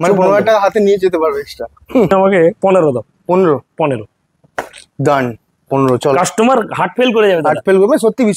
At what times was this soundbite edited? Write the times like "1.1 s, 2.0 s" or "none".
2.1 s